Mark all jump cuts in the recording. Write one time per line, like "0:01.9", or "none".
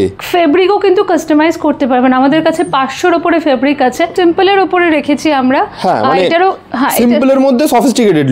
0:04.1